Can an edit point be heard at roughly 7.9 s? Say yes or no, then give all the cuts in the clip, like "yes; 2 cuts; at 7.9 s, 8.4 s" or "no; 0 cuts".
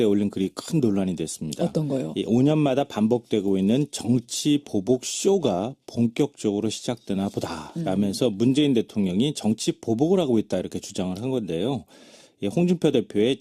no; 0 cuts